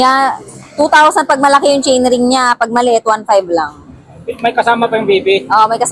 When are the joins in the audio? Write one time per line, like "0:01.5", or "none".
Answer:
none